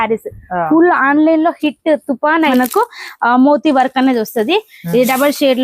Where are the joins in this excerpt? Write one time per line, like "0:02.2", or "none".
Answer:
0:02.5